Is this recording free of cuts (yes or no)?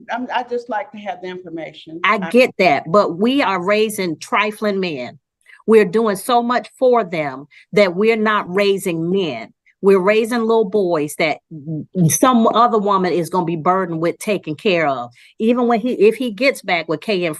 yes